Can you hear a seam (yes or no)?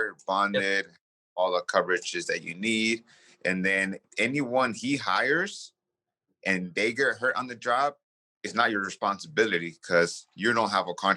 yes